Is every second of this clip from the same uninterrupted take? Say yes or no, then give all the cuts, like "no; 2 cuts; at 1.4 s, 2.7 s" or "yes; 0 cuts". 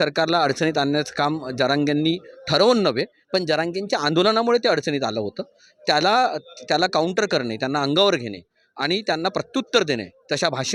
yes; 0 cuts